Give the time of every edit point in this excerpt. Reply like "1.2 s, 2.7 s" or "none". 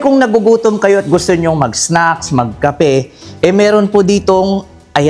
none